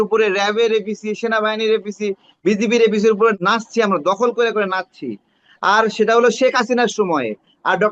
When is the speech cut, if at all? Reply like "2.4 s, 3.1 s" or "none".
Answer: 3.4 s